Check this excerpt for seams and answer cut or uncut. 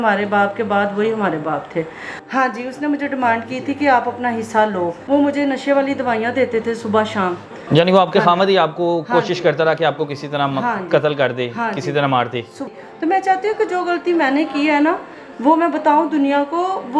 cut